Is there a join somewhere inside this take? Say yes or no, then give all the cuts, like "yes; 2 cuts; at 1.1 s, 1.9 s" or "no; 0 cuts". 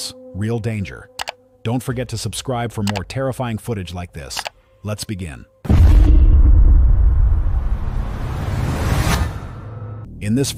no; 0 cuts